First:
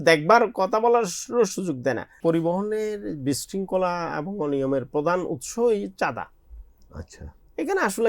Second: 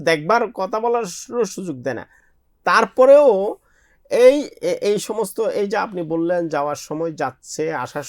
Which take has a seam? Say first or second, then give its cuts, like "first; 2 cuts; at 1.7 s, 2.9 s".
first; 1 cut; at 2.2 s